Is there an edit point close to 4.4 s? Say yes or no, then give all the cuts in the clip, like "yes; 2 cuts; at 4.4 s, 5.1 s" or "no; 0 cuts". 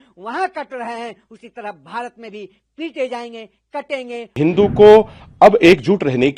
yes; 1 cut; at 4.4 s